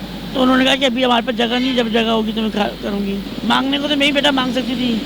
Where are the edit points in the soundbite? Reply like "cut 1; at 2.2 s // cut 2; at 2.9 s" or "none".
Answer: cut 1; at 3.3 s